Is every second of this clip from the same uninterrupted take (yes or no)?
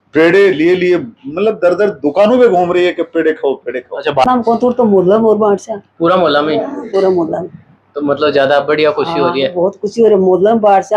no